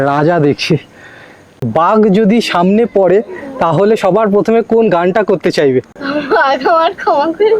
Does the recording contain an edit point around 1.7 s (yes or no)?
yes